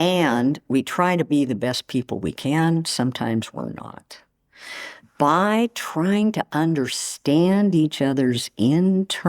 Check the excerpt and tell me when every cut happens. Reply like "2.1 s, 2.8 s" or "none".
4.6 s